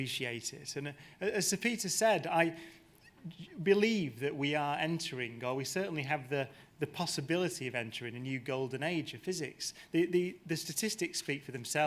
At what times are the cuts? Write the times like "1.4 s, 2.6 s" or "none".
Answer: none